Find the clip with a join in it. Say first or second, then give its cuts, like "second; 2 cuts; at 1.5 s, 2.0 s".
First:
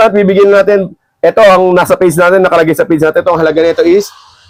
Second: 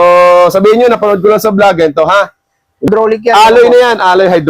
second; 1 cut; at 2.9 s